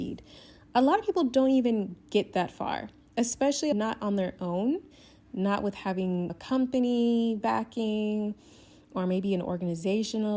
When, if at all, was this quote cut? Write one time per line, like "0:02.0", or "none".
none

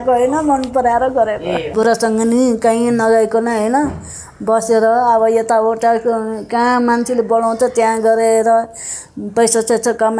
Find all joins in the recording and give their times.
0:01.7

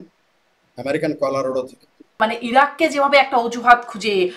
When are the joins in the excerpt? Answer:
0:02.2

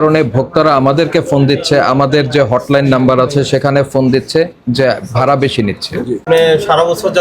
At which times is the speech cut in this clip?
0:06.2

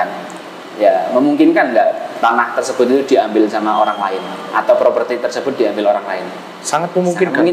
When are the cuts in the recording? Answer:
none

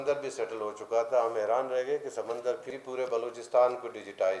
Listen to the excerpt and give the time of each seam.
0:02.7

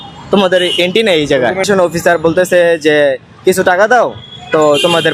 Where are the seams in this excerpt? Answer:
0:01.6

